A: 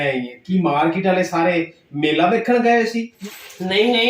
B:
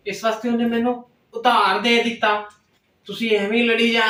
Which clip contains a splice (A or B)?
A